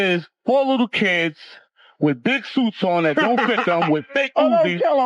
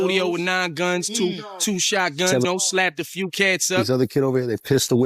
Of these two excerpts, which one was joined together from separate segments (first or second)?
second